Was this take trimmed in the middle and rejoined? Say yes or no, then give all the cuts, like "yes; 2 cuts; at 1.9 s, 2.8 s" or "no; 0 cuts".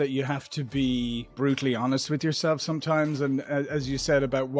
yes; 1 cut; at 1.3 s